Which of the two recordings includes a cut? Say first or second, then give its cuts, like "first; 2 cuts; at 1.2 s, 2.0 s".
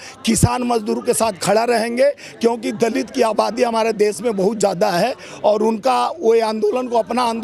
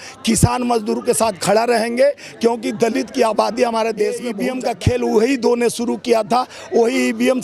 second; 1 cut; at 4.4 s